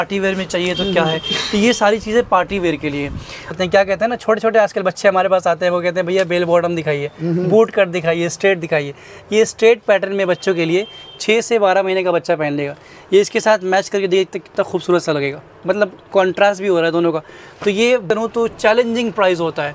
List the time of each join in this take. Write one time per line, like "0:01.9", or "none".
0:03.6
0:18.0